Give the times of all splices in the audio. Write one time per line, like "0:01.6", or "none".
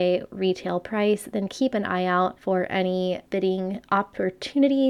0:02.4
0:03.2